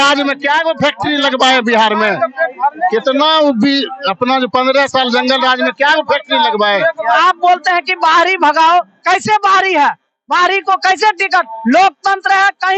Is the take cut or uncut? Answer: cut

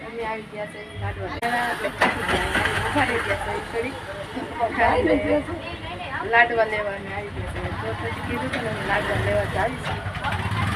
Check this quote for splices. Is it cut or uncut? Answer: cut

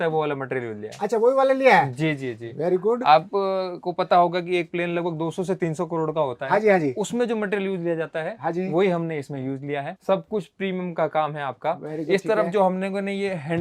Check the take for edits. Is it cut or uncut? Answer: cut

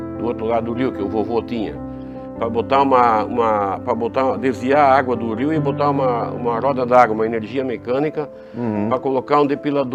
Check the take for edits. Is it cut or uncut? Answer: uncut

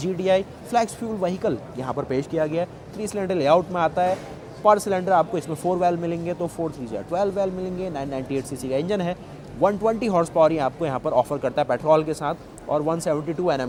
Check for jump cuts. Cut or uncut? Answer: uncut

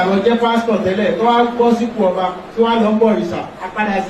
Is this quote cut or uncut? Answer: uncut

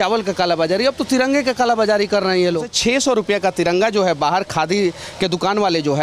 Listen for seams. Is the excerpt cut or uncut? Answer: cut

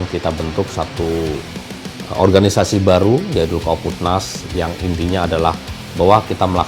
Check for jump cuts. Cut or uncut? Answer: uncut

